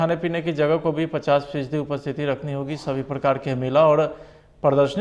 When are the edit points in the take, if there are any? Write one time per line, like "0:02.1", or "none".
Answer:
none